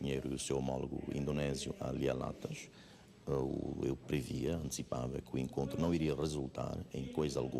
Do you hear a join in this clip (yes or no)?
no